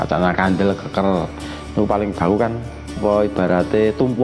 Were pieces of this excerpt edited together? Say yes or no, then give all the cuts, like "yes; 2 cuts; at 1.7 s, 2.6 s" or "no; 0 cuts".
yes; 1 cut; at 3.0 s